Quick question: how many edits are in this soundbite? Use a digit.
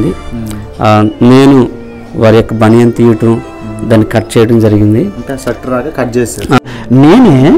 1